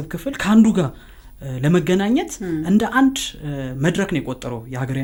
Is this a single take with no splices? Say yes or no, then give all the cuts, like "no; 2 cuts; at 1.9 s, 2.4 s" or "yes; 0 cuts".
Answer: yes; 0 cuts